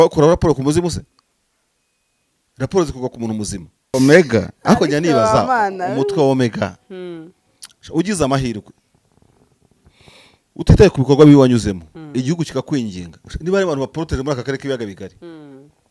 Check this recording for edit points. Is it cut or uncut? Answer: cut